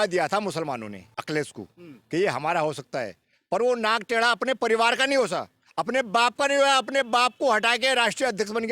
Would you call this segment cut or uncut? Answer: cut